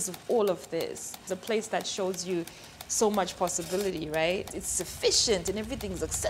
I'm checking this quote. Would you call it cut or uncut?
cut